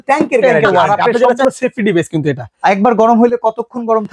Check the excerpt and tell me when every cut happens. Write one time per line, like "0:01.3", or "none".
0:01.4